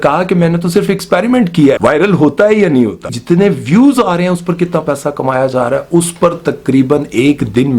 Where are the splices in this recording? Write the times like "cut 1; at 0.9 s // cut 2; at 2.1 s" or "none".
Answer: cut 1; at 1.8 s // cut 2; at 3.1 s